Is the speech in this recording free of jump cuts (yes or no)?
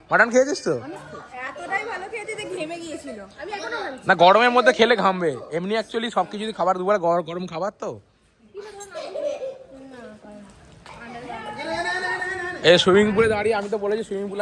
yes